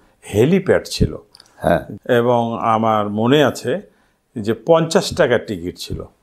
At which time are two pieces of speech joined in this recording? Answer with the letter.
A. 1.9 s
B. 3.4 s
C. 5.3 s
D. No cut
A